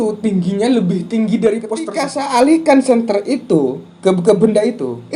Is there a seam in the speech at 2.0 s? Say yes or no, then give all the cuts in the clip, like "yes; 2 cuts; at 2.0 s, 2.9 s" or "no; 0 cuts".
yes; 1 cut; at 2.0 s